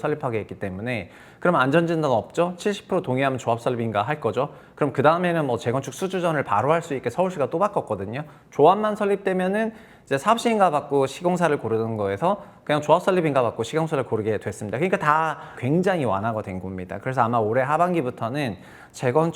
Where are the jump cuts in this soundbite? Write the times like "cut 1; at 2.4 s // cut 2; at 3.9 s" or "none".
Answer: cut 1; at 15.6 s